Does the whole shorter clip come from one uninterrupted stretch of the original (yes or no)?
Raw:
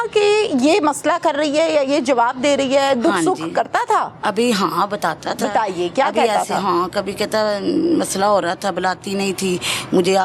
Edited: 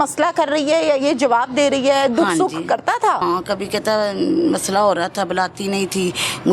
no